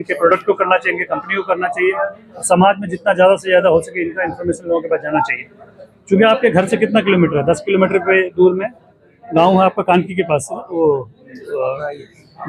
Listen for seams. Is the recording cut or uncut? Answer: uncut